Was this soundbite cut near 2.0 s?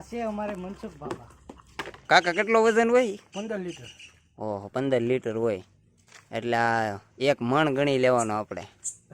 yes; 1 cut; at 2.0 s

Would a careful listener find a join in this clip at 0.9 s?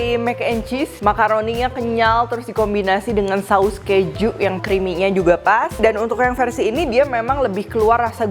yes; 3 cuts; at 0.9 s, 4.6 s, 5.7 s

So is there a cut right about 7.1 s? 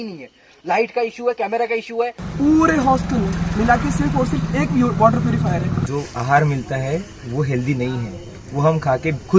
no; 2 cuts; at 2.2 s, 5.8 s

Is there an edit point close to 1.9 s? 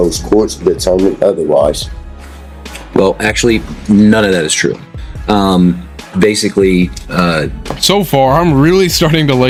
no; 0 cuts

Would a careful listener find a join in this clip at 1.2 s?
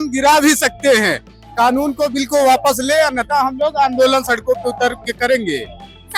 no; 0 cuts

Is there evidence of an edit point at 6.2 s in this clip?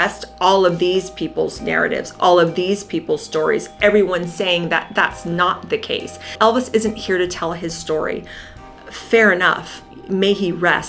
yes; 1 cut; at 6.2 s

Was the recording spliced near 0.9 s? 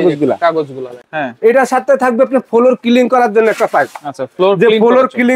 yes; 1 cut; at 0.9 s

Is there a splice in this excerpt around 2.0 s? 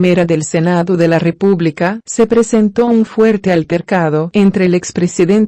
yes; 1 cut; at 2.0 s

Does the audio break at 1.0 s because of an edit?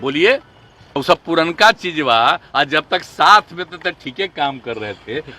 yes; 1 cut; at 1.0 s

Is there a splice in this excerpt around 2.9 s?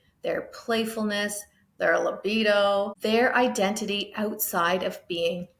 yes; 1 cut; at 2.9 s

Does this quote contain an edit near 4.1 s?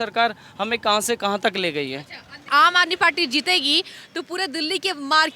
no; 1 cut; at 2.5 s

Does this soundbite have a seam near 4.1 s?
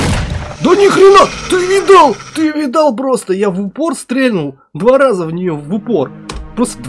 no; 0 cuts

